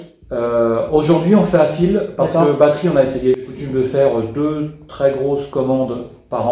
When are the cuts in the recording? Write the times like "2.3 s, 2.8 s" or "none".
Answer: 3.6 s